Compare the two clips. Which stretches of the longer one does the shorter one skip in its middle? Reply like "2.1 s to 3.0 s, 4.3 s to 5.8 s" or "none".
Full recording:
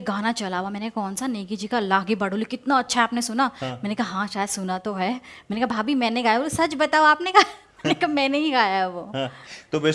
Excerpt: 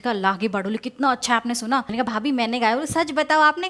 3.6 s to 5.5 s